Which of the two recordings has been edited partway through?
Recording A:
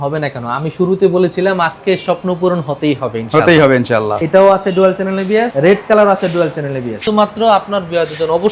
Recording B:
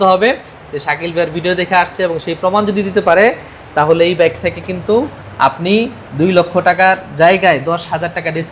A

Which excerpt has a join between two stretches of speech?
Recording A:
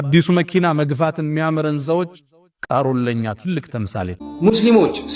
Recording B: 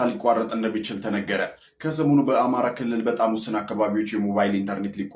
A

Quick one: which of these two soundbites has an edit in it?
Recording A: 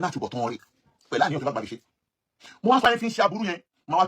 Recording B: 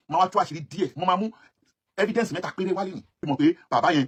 A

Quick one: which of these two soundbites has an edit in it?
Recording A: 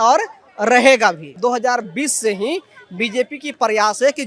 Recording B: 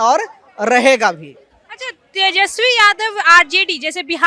A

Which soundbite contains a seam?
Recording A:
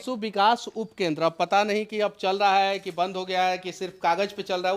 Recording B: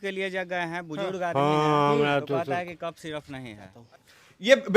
B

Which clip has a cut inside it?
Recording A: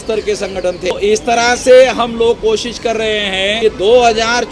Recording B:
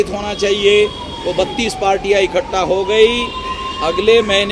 A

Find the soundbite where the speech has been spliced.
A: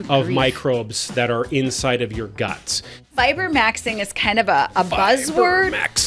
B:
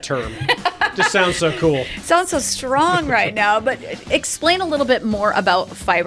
A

